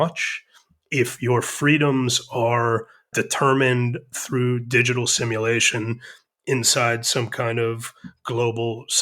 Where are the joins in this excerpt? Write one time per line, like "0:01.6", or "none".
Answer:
0:03.1